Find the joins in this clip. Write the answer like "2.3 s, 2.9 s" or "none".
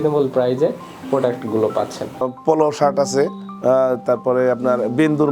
2.3 s